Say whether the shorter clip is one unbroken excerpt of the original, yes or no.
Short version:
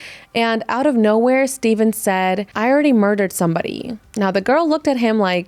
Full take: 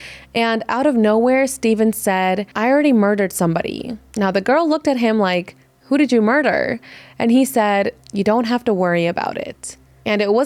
yes